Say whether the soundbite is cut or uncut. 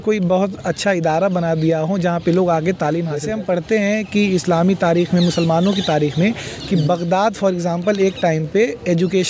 cut